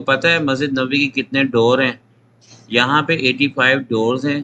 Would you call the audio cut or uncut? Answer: uncut